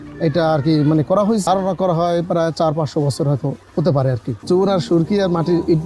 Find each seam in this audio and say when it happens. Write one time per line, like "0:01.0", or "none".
0:01.4
0:04.3